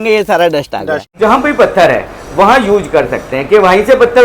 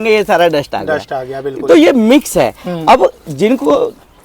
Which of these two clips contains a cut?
first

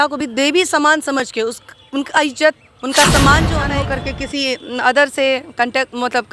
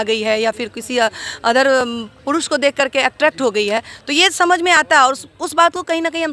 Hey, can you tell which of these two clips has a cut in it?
first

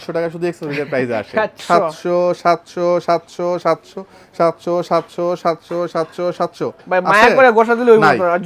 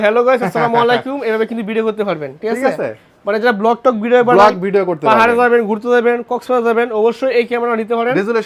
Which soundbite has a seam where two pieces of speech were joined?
first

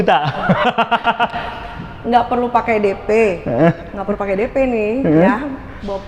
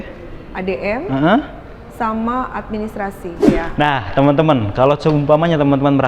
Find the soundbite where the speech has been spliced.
second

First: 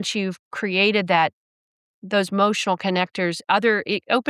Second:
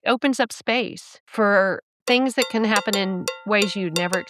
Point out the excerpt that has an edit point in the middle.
second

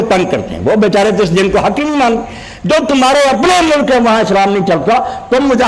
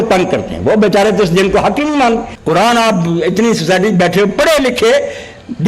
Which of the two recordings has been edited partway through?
second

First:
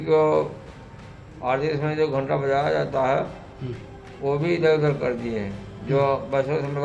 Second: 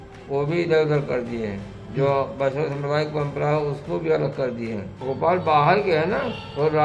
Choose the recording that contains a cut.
second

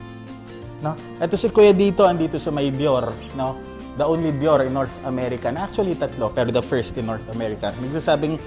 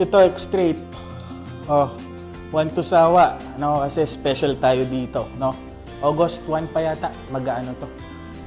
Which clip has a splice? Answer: second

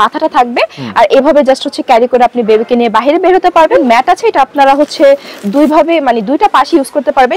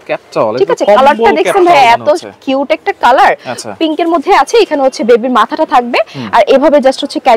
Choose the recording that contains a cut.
first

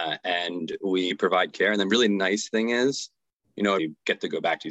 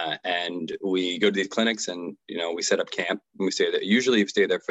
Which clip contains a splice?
first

